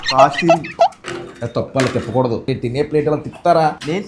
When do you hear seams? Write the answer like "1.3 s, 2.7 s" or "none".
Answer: 1.1 s, 2.4 s

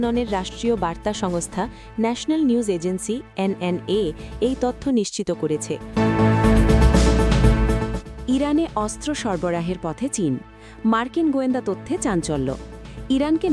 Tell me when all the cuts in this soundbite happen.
5.8 s, 8.1 s

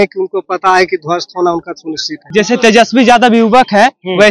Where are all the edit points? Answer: 2.1 s

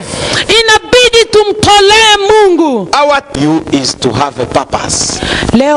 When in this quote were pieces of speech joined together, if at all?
3.3 s

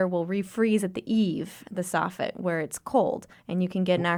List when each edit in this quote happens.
none

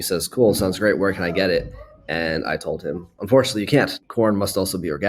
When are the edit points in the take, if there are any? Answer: 3.9 s

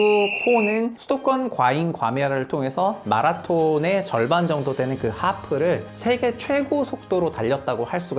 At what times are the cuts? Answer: 1.0 s, 5.9 s

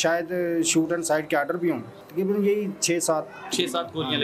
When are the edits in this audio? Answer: 1.9 s

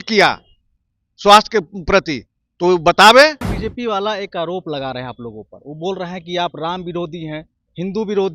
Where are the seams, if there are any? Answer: 3.5 s

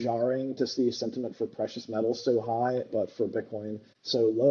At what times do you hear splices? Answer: none

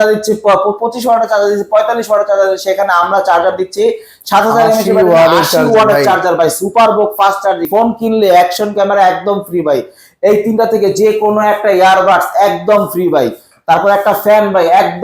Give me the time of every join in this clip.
7.6 s

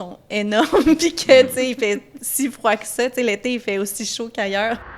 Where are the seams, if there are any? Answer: none

